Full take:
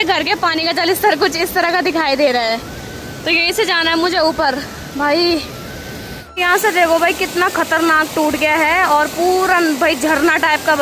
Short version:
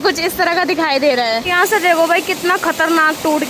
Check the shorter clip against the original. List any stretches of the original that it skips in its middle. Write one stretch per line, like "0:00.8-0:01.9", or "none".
0:02.6-0:06.4